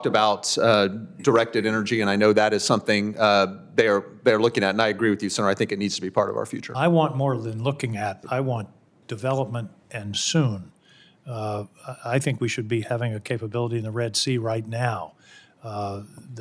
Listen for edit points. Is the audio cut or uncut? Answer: uncut